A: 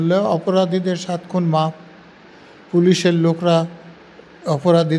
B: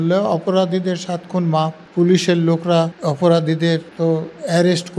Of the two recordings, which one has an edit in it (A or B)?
B